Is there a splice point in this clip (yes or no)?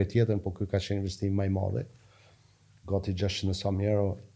no